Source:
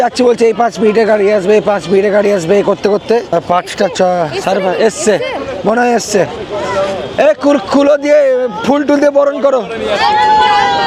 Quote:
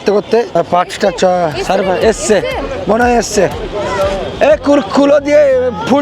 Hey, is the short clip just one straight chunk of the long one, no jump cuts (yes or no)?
yes